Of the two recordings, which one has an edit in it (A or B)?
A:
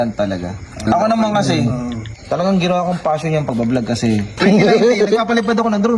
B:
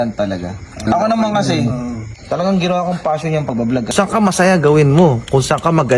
B